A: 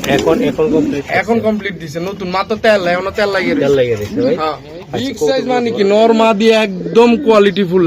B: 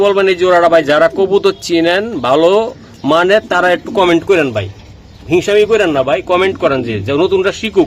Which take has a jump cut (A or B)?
A